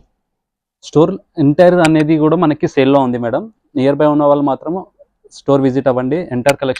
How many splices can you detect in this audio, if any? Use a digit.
0